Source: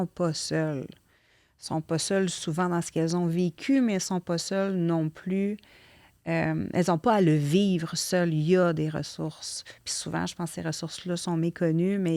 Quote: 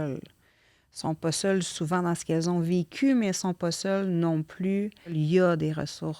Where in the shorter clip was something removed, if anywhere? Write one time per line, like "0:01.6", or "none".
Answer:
0:05.1